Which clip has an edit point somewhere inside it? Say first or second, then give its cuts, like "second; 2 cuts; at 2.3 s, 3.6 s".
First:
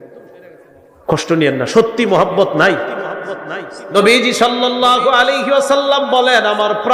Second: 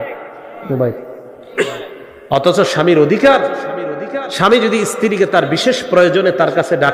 first; 1 cut; at 3.8 s